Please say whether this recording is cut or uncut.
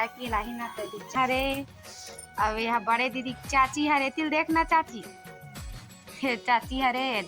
cut